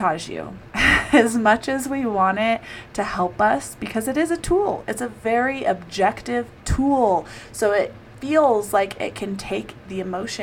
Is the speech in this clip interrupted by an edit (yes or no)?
no